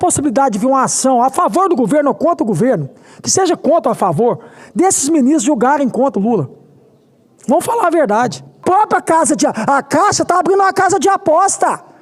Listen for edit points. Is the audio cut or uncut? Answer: cut